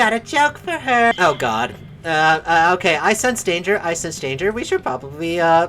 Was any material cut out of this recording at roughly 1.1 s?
yes; 1 cut; at 1.1 s

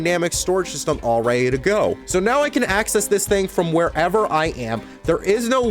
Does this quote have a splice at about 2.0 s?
yes; 1 cut; at 2.0 s

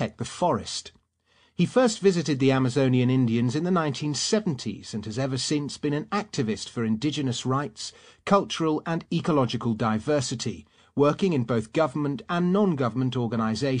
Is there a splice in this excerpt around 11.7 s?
yes; 1 cut; at 11.7 s

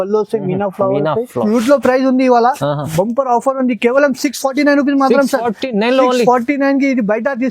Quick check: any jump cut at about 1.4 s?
yes; 1 cut; at 1.4 s

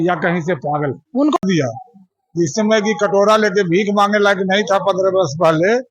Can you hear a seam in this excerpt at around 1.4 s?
yes; 1 cut; at 1.4 s

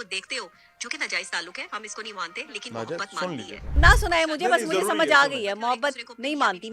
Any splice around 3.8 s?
yes; 1 cut; at 3.8 s

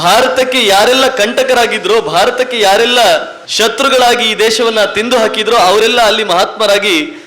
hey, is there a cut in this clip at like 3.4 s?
yes; 1 cut; at 3.4 s

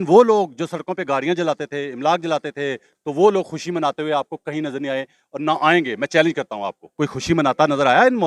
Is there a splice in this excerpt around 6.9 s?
yes; 2 cuts; at 2.9 s, 6.9 s

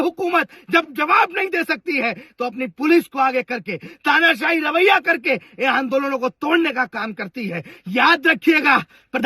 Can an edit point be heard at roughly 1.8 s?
no; 0 cuts

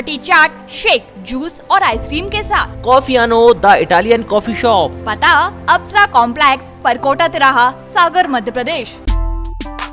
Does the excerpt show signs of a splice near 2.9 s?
no; 1 cut; at 9.0 s

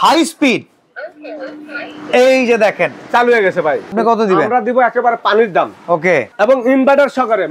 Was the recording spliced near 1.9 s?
no; 2 cuts; at 3.9 s, 6.3 s

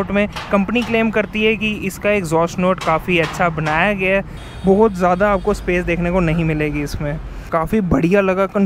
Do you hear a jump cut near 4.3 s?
yes; 2 cuts; at 4.3 s, 7.5 s

